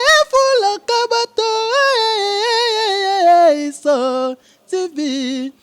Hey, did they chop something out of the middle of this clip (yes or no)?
no